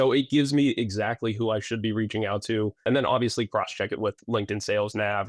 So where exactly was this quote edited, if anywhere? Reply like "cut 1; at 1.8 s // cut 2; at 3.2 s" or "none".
cut 1; at 2.8 s